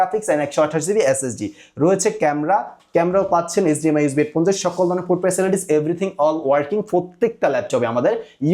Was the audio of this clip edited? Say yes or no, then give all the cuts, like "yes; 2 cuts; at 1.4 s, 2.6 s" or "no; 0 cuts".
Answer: no; 0 cuts